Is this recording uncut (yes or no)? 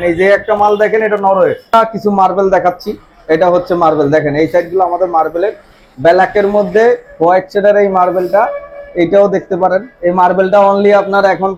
no